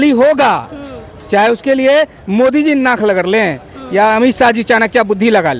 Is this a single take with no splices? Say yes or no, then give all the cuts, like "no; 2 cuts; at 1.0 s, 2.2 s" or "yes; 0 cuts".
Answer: yes; 0 cuts